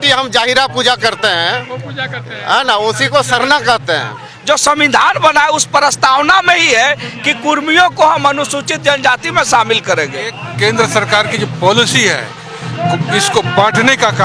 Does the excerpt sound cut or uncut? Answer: cut